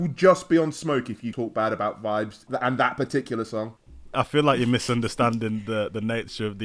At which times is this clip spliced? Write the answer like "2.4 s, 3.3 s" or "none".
1.3 s, 2.4 s, 4.1 s